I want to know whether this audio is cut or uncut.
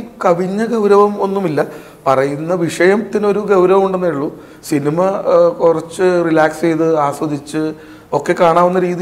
uncut